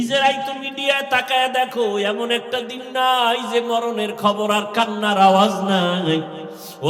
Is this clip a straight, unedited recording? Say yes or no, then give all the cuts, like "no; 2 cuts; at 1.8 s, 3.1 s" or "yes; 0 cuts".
yes; 0 cuts